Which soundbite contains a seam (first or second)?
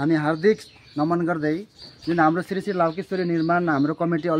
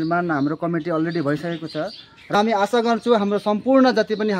second